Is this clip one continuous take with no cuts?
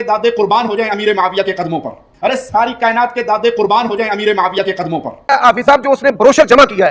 no; 1 cut; at 5.1 s

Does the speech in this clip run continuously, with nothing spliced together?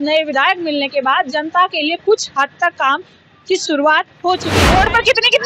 no; 1 cut; at 4.5 s

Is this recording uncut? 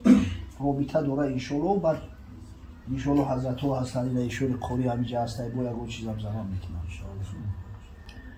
yes; 0 cuts

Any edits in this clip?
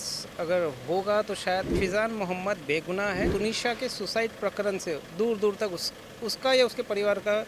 yes; 2 cuts; at 1.7 s, 3.3 s

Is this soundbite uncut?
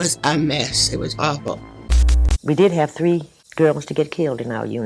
no; 1 cut; at 1.8 s

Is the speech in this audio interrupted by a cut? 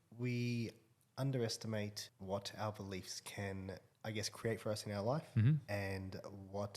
yes; 2 cuts; at 2.1 s, 3.9 s

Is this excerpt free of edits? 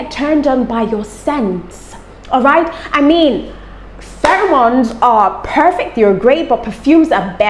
yes; 0 cuts

